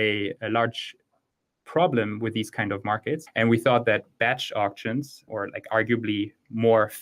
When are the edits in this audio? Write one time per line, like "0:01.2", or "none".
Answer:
0:03.3